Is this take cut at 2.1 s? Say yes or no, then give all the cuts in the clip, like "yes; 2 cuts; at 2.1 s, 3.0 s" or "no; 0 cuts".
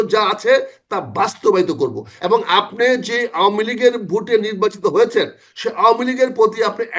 yes; 1 cut; at 2.1 s